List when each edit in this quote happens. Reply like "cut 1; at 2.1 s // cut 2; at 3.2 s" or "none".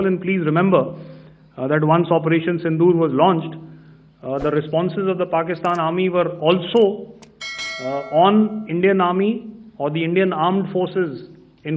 none